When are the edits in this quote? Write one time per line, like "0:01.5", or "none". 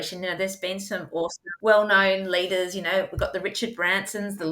0:01.5